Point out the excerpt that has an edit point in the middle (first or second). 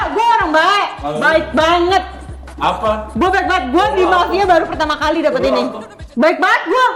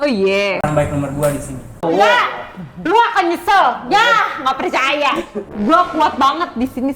second